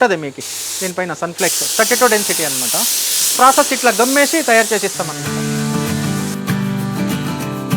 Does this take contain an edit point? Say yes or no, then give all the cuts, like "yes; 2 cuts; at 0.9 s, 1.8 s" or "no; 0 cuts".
no; 0 cuts